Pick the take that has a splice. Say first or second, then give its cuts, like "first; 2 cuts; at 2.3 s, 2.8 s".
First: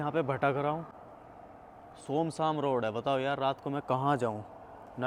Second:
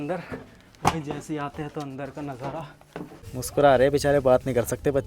second; 1 cut; at 3.2 s